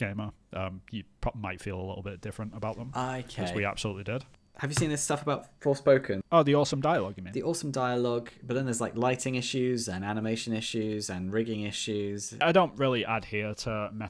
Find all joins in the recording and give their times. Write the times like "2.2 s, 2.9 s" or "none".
4.4 s, 6.2 s, 12.4 s